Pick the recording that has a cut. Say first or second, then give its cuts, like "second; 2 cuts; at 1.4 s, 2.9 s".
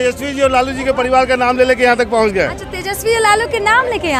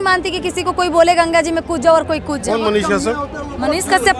second; 1 cut; at 2.4 s